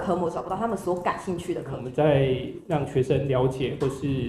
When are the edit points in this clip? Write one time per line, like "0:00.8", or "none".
0:01.8